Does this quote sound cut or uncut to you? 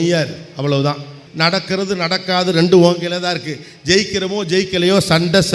cut